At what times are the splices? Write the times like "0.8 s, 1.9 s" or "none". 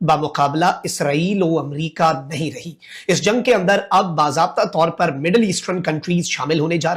none